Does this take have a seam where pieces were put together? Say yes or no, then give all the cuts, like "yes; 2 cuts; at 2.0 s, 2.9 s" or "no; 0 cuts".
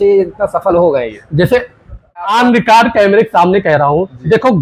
yes; 1 cut; at 2.2 s